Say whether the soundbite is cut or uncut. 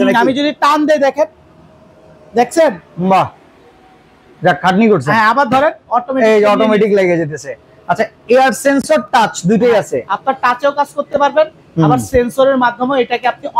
uncut